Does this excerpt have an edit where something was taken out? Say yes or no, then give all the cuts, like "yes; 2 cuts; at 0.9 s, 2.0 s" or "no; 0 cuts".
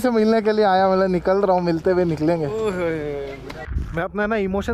yes; 1 cut; at 3.8 s